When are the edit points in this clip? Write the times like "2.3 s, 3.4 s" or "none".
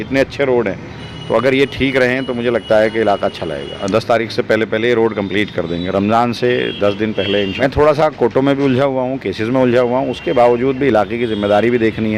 3.8 s, 7.5 s